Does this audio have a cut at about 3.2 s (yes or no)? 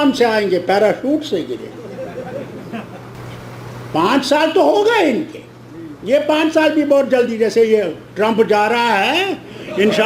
yes